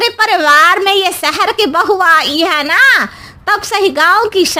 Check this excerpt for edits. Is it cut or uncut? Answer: uncut